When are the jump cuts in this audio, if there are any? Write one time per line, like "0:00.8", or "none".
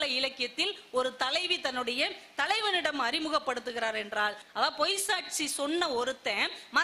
0:04.4